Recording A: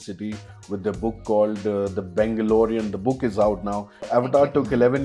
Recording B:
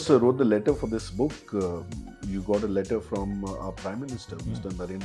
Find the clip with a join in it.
A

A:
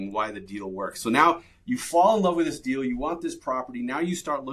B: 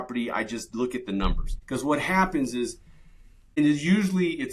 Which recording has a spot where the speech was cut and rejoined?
B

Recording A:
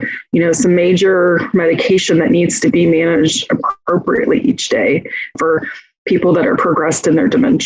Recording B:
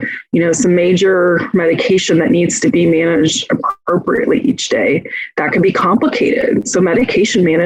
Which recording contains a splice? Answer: A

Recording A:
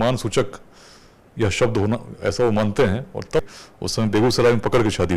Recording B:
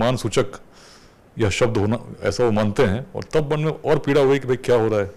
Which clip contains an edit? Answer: A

